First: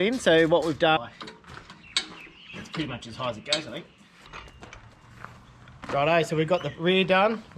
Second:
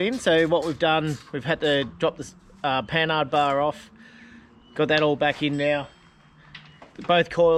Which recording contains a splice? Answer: first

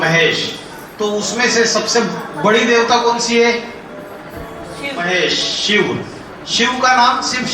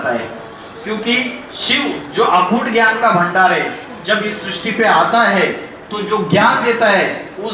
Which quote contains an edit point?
first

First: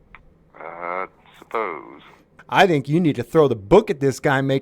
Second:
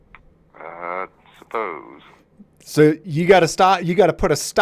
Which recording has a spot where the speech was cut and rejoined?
first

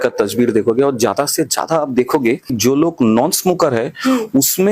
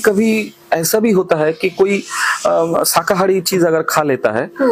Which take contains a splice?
first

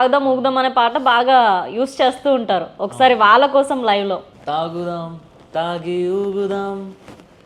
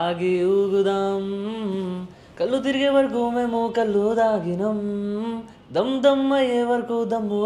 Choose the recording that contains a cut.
first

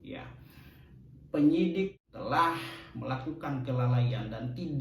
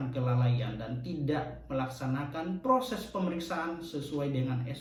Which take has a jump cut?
first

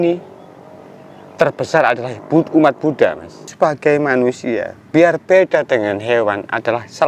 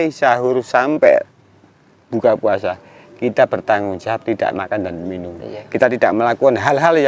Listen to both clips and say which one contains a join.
first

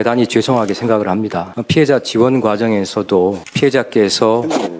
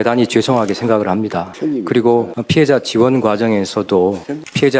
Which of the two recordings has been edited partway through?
first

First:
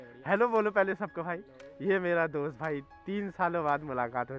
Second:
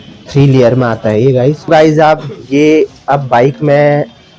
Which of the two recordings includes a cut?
second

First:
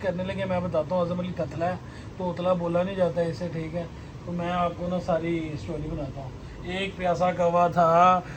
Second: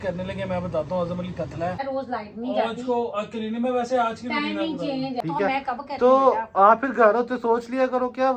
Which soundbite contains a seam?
second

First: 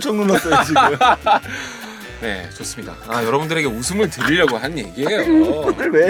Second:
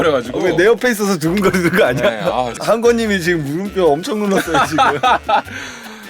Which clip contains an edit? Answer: second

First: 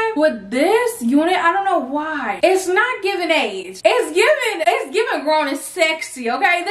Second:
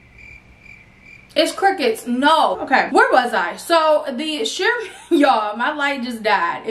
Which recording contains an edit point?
second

